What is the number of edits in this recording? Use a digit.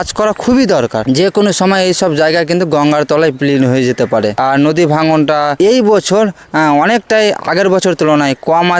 3